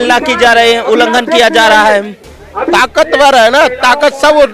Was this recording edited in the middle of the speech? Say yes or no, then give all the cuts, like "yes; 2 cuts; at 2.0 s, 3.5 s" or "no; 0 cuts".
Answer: yes; 1 cut; at 2.7 s